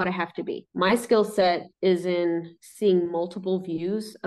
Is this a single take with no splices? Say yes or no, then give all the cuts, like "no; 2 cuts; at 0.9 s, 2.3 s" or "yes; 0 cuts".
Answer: yes; 0 cuts